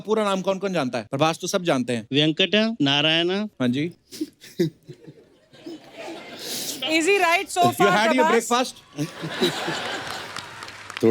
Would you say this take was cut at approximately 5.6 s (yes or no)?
no